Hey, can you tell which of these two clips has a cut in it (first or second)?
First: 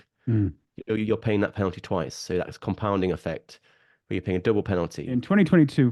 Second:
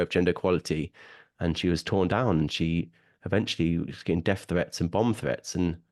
first